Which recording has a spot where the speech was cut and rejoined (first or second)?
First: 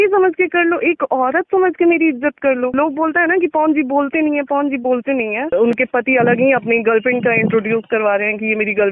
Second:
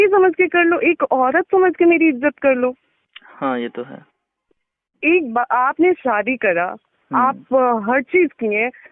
first